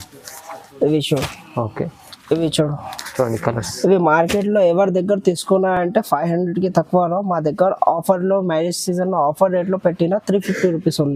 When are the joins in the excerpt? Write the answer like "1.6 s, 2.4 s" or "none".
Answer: none